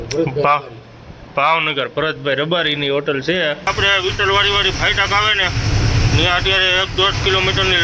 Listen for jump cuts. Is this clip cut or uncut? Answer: cut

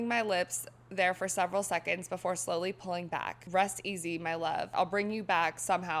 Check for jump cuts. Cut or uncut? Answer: cut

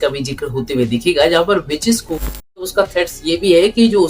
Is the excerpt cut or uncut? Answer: cut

